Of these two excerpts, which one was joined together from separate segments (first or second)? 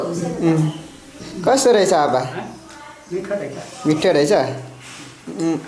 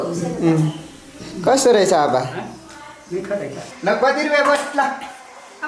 second